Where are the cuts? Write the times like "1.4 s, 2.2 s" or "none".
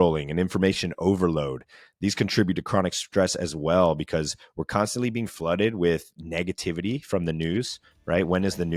none